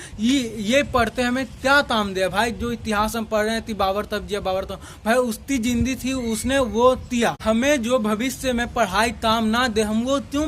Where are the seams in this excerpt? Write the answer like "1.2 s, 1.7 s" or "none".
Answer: 7.4 s